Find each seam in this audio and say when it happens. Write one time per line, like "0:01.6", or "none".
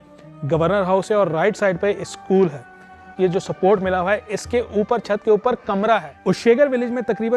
0:03.1
0:06.1